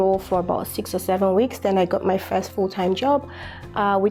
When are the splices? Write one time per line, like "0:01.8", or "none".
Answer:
none